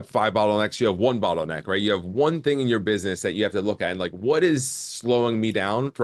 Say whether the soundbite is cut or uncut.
uncut